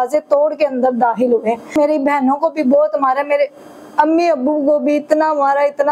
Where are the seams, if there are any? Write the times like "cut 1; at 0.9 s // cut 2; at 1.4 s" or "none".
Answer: cut 1; at 1.7 s